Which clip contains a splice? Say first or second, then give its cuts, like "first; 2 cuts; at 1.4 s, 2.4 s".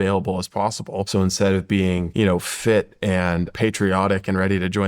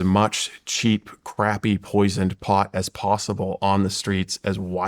first; 3 cuts; at 1.1 s, 2.1 s, 3.5 s